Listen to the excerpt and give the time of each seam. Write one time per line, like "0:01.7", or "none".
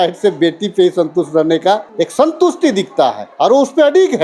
0:01.9
0:03.2